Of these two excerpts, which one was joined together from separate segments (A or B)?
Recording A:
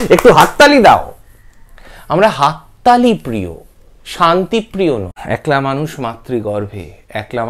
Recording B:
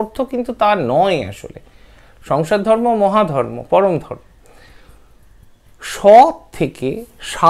A